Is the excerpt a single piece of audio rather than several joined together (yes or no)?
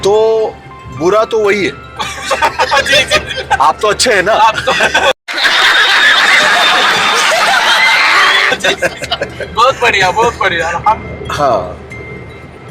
yes